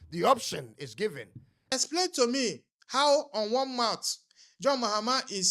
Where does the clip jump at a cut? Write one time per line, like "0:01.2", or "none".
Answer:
0:01.6